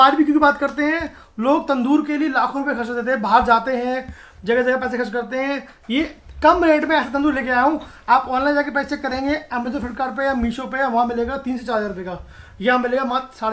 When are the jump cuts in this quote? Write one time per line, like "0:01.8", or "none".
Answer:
none